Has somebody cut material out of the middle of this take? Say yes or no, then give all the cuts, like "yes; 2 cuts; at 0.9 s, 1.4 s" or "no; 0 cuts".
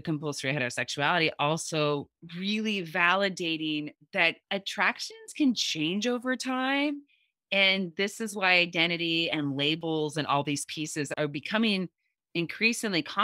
yes; 1 cut; at 11.1 s